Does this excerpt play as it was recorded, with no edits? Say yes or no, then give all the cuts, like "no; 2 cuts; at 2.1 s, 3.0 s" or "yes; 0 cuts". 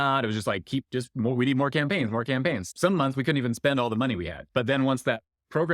no; 2 cuts; at 2.7 s, 4.5 s